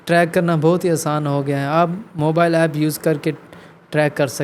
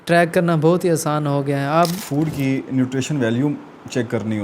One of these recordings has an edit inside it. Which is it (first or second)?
second